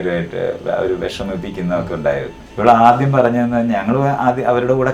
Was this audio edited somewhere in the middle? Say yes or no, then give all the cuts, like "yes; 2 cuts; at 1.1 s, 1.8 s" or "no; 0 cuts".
yes; 1 cut; at 2.4 s